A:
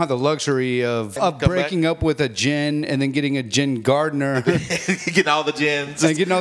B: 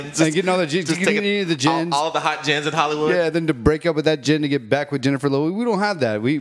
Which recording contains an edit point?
A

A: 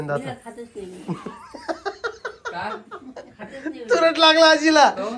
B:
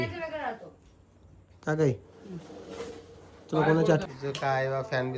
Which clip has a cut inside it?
B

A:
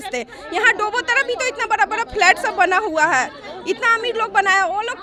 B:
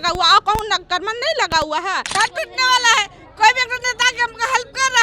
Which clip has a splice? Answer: B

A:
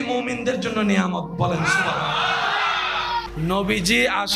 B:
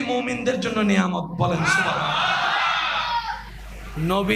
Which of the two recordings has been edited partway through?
A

